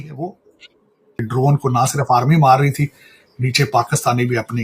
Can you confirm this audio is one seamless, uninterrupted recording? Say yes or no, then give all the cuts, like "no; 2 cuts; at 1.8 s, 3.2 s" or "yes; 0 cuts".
no; 1 cut; at 1.2 s